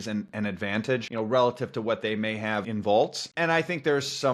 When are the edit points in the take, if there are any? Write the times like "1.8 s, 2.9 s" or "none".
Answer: 1.1 s, 2.7 s, 3.2 s